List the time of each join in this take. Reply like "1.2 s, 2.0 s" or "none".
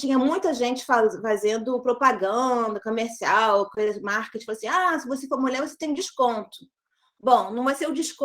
none